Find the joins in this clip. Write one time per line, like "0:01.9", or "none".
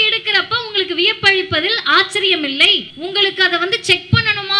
0:02.9